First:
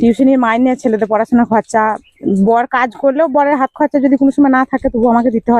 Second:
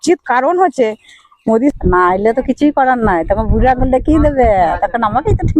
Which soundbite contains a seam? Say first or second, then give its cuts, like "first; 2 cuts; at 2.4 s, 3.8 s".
second; 1 cut; at 1.7 s